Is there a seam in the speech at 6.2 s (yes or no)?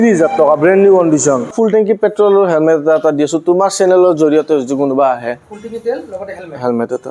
no